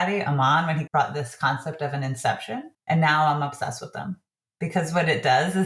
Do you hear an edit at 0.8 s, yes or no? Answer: yes